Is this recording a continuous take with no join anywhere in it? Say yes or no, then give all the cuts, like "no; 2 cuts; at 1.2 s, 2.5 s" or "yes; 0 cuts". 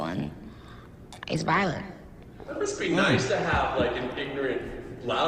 yes; 0 cuts